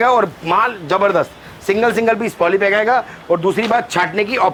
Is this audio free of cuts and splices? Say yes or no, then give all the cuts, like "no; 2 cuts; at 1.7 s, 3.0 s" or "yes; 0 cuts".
yes; 0 cuts